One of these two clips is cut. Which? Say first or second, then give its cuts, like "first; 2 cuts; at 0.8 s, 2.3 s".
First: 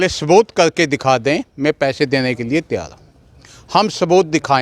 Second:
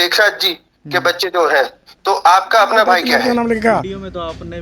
second; 1 cut; at 3.2 s